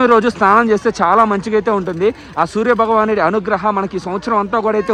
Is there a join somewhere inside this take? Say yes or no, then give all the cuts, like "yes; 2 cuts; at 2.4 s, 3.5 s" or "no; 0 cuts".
no; 0 cuts